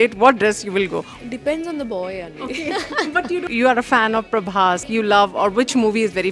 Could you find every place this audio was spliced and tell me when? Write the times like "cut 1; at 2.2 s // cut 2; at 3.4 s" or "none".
cut 1; at 1.1 s // cut 2; at 3.5 s // cut 3; at 4.8 s